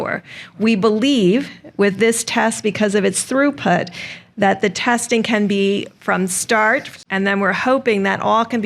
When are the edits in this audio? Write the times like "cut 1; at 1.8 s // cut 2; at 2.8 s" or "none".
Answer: cut 1; at 6.9 s